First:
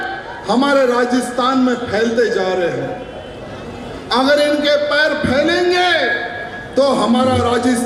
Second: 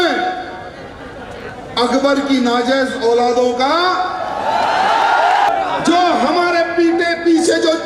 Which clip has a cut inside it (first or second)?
second